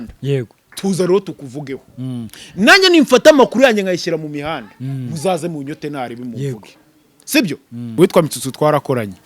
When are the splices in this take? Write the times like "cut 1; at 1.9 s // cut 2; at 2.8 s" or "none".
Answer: cut 1; at 7.9 s